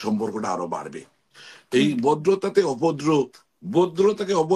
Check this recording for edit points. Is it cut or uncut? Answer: cut